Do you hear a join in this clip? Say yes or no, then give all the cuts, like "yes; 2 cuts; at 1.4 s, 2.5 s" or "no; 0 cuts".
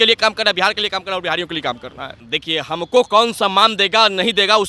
yes; 1 cut; at 2.3 s